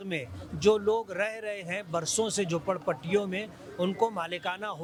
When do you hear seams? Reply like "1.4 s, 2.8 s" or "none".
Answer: none